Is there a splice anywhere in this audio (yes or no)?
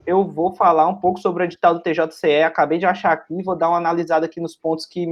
no